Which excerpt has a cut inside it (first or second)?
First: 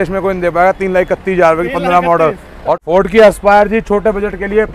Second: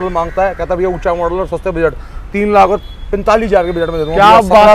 first